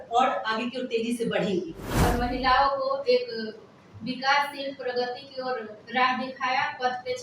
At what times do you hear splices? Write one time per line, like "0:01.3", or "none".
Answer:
0:01.8